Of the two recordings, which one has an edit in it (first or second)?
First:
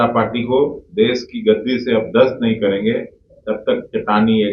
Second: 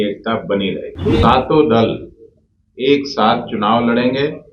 second